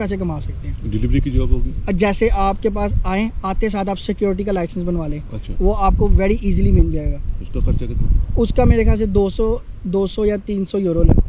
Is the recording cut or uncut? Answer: uncut